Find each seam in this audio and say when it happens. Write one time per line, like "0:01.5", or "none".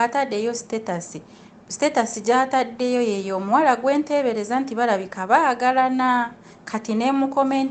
none